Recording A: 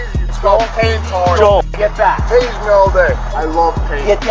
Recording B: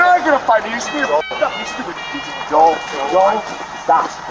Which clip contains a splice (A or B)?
B